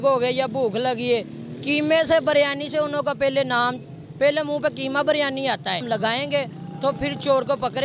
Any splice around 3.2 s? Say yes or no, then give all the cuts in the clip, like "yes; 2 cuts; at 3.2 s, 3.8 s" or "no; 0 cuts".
no; 1 cut; at 5.8 s